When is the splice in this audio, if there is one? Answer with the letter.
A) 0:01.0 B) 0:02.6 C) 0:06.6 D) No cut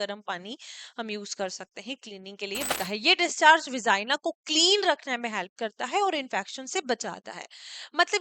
B